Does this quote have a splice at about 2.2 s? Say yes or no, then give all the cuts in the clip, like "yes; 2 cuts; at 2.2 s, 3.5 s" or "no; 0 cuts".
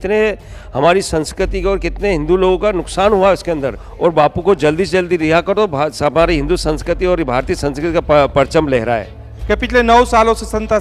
no; 2 cuts; at 3.9 s, 9.3 s